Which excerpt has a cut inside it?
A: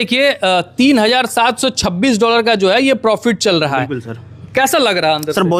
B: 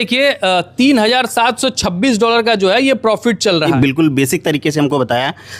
B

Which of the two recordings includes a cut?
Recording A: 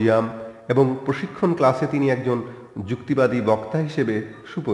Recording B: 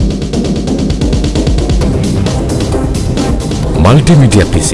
A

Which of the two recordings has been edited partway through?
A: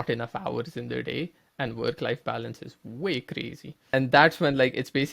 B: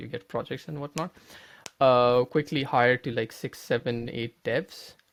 A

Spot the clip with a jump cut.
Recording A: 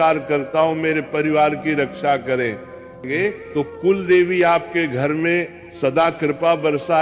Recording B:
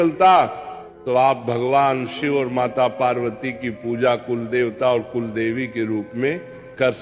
A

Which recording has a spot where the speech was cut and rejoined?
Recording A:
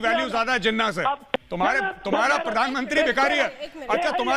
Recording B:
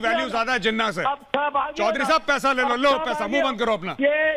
A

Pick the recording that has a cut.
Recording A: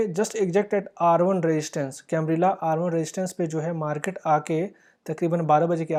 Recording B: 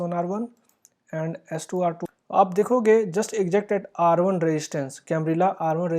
B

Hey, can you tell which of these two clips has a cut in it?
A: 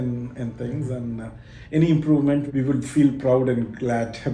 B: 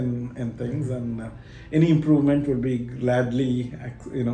A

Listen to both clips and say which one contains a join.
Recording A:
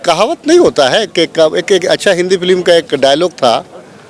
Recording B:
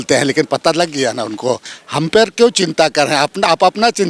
B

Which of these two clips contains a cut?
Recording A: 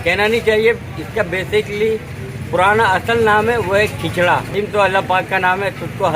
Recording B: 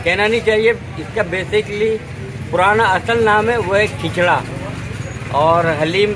A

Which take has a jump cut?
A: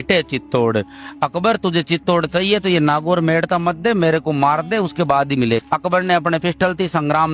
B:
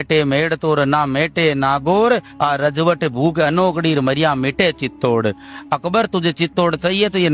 A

